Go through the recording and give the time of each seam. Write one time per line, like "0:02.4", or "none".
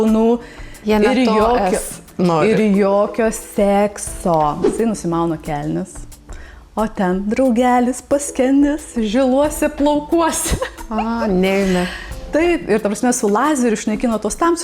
0:04.6